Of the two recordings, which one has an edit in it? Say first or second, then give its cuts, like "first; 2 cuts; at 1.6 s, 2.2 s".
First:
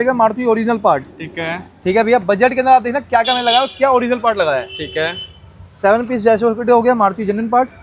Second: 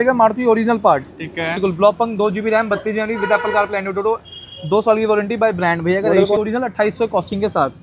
second; 2 cuts; at 1.6 s, 6.4 s